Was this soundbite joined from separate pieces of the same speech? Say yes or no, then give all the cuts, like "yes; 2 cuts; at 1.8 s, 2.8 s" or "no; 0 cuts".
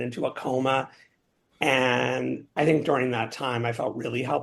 yes; 1 cut; at 2.5 s